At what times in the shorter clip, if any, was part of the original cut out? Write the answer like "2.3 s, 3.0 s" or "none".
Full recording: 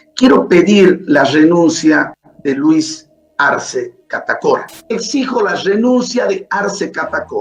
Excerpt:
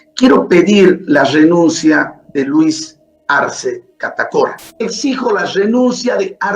2.2 s